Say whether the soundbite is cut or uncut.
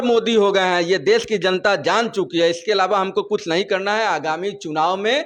uncut